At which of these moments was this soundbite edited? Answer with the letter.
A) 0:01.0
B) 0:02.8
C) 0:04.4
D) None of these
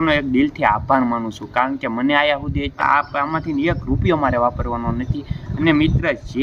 B